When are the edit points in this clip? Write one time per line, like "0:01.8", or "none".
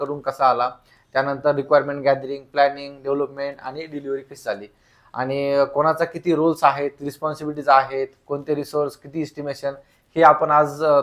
none